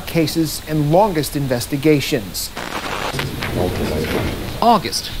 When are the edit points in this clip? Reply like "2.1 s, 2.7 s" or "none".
2.8 s